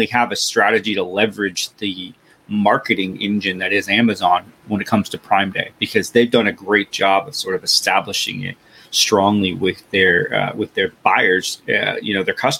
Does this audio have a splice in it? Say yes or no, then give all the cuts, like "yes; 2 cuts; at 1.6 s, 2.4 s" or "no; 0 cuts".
no; 0 cuts